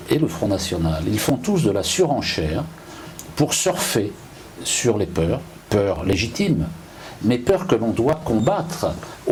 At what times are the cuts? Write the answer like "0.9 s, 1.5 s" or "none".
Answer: none